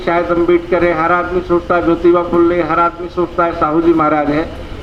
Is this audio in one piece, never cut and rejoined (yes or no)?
yes